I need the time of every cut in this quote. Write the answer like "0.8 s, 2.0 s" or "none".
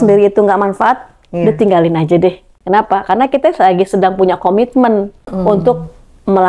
2.5 s, 5.3 s